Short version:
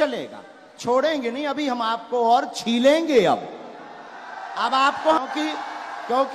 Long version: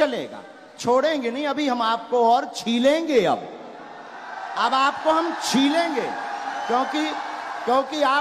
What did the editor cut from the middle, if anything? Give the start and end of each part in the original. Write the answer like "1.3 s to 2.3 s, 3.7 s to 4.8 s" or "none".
5.2 s to 6.8 s